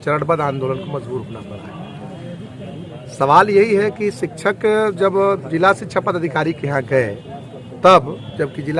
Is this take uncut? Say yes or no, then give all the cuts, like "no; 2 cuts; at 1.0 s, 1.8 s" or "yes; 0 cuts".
yes; 0 cuts